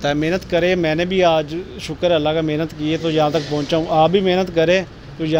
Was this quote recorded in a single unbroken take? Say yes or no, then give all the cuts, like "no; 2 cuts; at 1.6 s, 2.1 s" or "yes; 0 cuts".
yes; 0 cuts